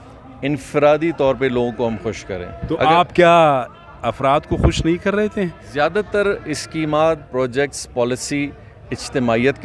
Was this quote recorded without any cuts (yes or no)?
no